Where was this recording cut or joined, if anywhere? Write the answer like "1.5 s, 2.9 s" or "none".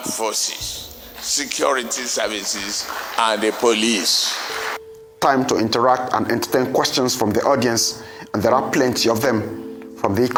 none